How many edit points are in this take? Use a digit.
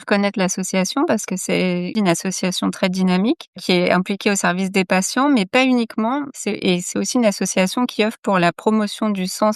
1